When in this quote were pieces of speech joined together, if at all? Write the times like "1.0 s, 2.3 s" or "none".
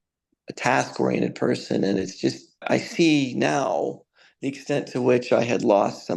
2.7 s

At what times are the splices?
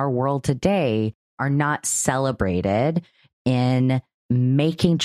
1.3 s, 4.1 s

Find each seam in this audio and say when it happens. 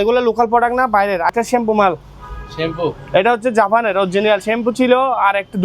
1.3 s

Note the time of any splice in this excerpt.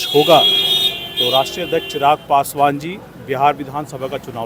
none

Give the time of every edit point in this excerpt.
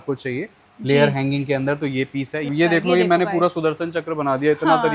2.5 s

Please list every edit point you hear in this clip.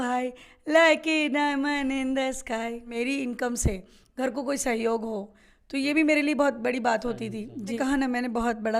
2.9 s, 7.8 s

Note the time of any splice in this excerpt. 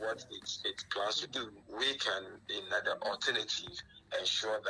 1.6 s

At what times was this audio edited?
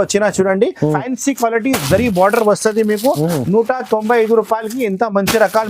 1.0 s

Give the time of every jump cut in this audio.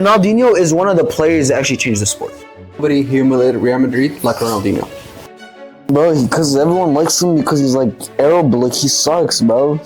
2.8 s, 5.5 s

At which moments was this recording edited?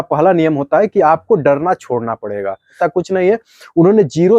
2.7 s

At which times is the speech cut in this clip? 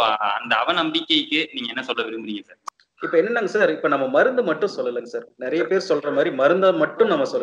2.6 s

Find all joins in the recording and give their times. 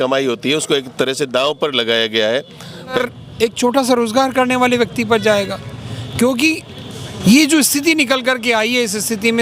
3.0 s

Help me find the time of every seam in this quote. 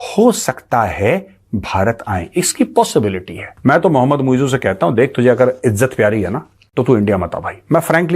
3.4 s, 6.5 s

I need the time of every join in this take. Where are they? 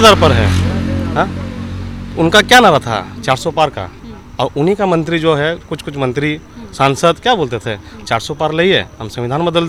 none

